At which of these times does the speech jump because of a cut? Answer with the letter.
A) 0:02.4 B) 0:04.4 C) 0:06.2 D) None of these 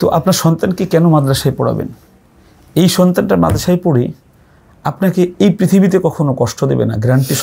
D